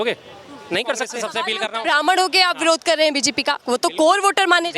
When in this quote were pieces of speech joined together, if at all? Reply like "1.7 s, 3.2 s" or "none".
1.3 s